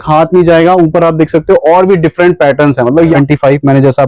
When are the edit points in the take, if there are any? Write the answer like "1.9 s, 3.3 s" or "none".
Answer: 3.2 s